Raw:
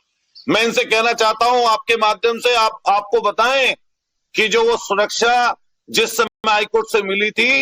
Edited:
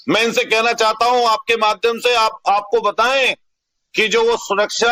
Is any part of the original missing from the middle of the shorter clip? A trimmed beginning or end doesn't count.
no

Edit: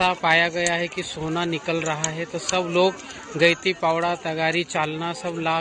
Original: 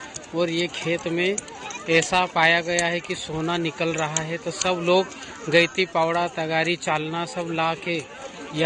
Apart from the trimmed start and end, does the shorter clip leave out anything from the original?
no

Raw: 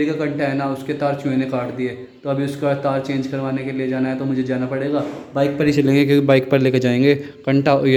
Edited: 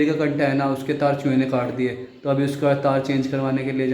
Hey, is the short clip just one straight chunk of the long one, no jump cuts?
yes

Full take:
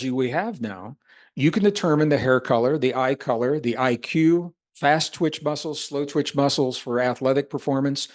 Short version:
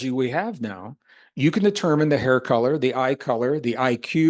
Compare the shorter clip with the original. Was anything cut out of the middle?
no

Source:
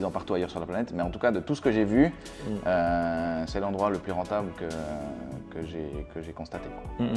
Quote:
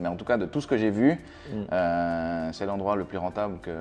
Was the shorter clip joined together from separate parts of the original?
no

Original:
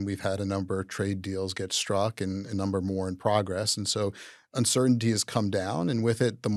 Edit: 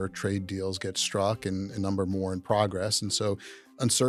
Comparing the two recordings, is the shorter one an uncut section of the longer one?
yes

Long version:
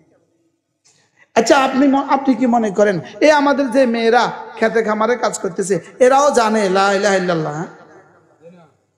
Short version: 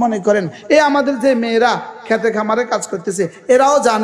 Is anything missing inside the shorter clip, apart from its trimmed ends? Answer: no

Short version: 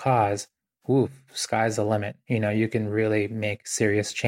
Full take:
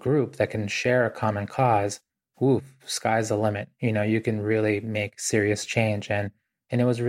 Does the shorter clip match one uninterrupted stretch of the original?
yes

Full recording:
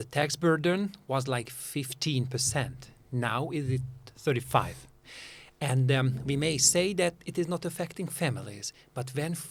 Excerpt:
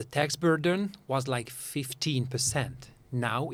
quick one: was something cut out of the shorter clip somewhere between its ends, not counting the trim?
no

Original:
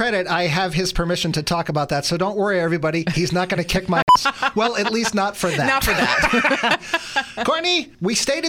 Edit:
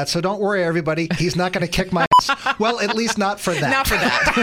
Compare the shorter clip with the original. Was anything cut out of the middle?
no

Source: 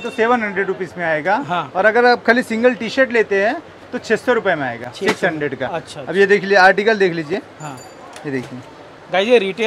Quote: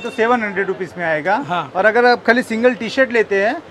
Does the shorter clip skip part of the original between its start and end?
no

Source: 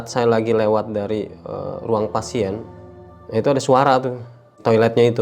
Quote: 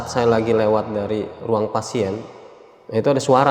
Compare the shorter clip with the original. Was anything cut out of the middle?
yes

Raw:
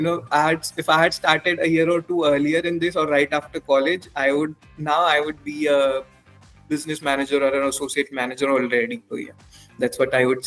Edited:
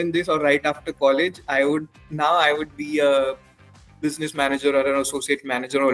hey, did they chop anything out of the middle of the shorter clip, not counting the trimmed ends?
no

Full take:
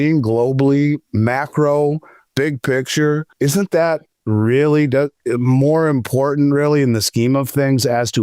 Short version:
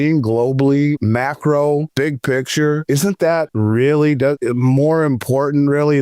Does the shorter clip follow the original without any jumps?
no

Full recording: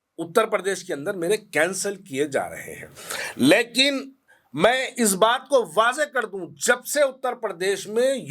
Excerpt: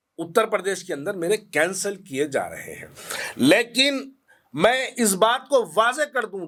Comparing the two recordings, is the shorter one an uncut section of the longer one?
yes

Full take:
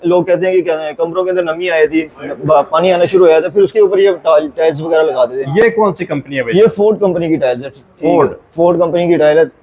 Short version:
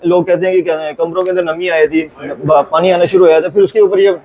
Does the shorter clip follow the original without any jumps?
yes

